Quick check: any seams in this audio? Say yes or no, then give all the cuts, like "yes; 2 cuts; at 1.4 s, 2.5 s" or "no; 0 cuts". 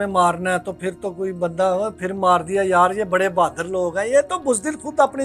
no; 0 cuts